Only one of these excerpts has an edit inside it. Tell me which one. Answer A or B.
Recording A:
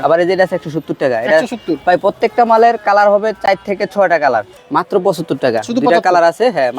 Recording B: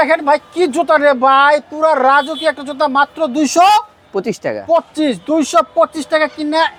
A